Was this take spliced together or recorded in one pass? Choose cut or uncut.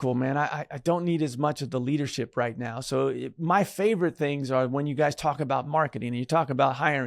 uncut